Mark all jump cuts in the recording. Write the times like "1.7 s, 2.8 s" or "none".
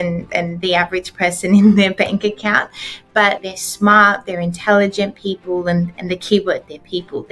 3.4 s